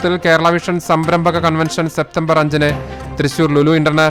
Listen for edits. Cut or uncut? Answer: uncut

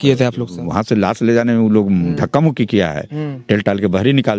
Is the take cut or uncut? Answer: uncut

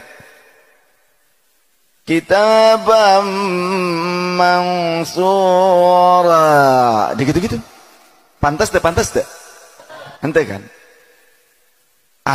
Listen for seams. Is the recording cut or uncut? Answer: uncut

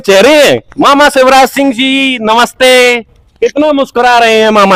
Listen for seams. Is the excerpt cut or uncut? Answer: uncut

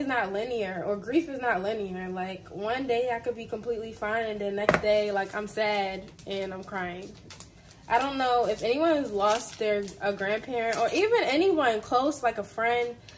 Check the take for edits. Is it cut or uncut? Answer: uncut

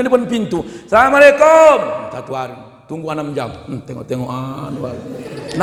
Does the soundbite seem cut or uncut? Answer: uncut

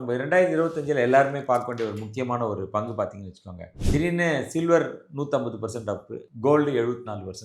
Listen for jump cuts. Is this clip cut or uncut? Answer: cut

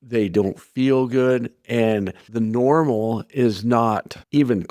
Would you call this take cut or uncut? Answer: uncut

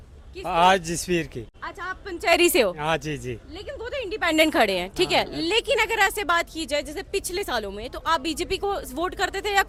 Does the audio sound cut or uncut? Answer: uncut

